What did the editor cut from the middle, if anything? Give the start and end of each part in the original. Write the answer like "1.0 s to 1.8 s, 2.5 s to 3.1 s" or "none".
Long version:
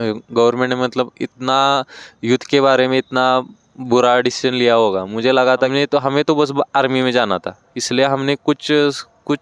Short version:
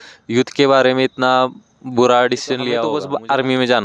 4.9 s to 6.4 s